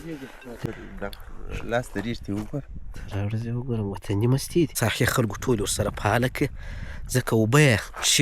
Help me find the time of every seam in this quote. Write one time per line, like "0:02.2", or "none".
0:00.7
0:04.7